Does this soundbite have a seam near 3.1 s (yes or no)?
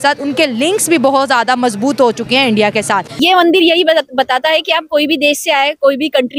yes